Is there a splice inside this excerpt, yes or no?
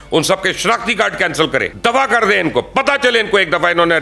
yes